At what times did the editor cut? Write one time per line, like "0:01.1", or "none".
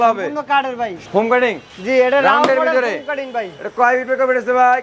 0:01.0